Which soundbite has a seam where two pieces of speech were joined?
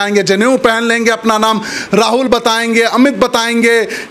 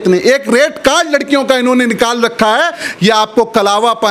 second; 1 cut; at 2.8 s

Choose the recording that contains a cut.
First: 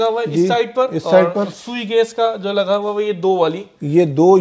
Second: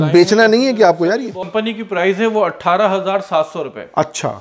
second; 1 cut; at 1.4 s

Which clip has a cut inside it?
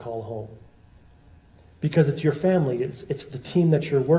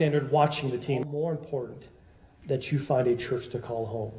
second; 1 cut; at 1.0 s

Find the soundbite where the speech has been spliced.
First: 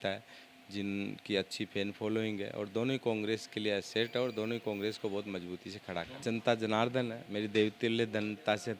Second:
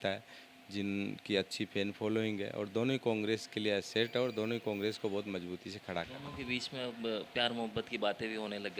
first; 2 cuts; at 6.1 s, 7.2 s

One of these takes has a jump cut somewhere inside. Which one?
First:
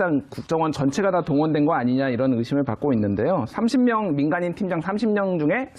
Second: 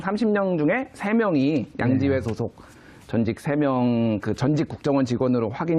first; 1 cut; at 3.6 s

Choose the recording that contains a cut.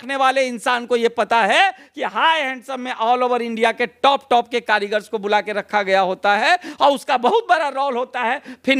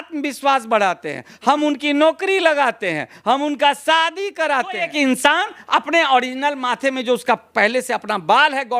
second; 1 cut; at 4.8 s

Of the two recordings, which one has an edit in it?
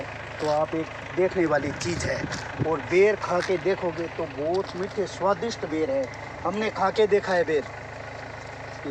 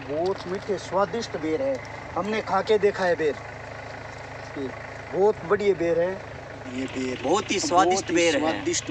second; 1 cut; at 6.7 s

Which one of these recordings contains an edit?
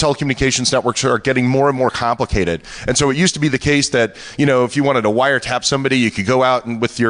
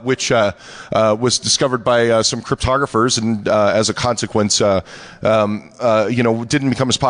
second; 1 cut; at 3.5 s

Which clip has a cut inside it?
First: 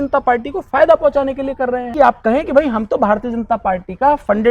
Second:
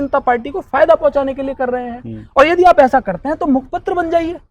first; 1 cut; at 1.9 s

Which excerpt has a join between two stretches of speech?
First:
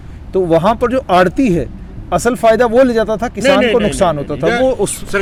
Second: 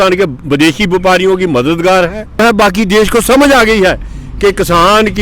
second; 1 cut; at 2.4 s

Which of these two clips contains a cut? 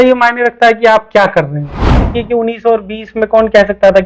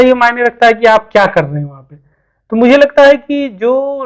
first; 1 cut; at 2.1 s

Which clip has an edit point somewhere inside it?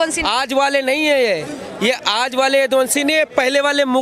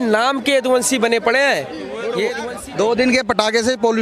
second; 1 cut; at 2.4 s

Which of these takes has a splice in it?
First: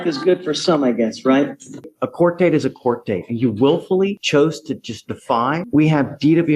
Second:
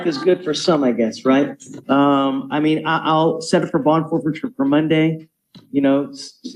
first; 2 cuts; at 1.8 s, 5.6 s

